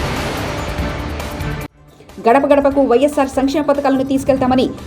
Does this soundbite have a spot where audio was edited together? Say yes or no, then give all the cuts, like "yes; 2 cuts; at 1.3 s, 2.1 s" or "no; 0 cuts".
yes; 1 cut; at 1.7 s